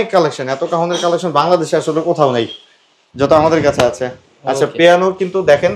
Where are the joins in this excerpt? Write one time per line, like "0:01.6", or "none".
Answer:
none